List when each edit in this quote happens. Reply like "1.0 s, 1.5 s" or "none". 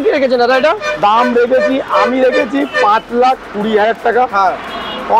none